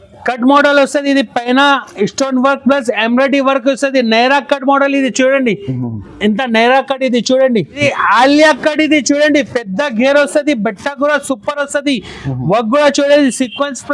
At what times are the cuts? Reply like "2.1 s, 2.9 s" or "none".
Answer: 7.8 s